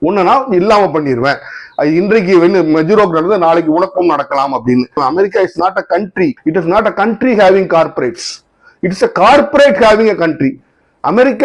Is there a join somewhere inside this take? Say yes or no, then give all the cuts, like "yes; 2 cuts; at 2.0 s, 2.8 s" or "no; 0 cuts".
yes; 1 cut; at 5.0 s